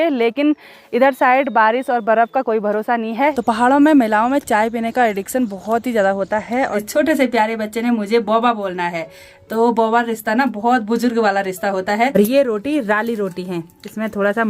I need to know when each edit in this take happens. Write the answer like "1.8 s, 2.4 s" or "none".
3.3 s, 6.8 s, 12.1 s